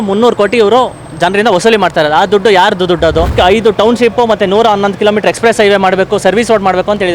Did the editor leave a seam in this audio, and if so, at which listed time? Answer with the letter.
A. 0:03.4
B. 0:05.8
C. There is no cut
A